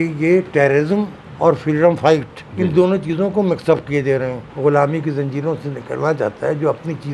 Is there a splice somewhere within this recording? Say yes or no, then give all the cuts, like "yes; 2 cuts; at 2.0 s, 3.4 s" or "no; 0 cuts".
yes; 3 cuts; at 1.2 s, 2.4 s, 4.4 s